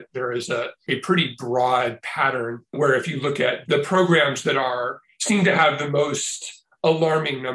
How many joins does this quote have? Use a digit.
1